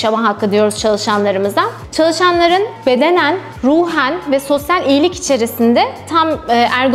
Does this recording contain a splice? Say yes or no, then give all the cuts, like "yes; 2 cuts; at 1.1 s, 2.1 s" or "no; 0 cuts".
no; 0 cuts